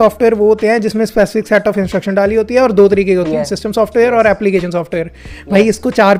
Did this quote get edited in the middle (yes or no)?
no